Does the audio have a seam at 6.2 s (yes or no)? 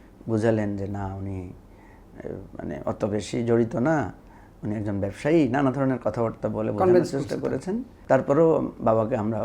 no